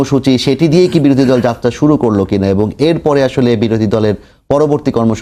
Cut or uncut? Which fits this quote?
uncut